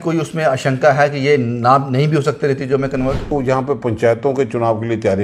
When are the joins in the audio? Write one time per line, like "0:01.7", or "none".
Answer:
0:03.3